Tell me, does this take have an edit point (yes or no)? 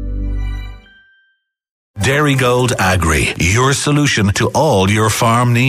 yes